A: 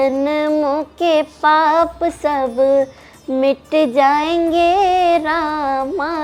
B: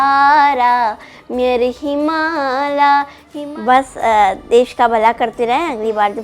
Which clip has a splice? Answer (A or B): B